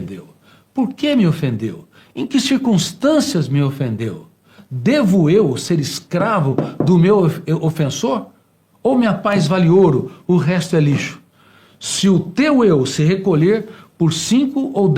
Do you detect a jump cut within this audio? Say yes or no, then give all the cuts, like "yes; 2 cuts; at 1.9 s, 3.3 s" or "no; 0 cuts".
no; 0 cuts